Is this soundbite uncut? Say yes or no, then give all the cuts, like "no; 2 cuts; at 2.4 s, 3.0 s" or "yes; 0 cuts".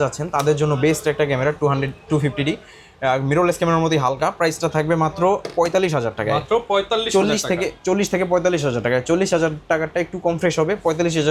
yes; 0 cuts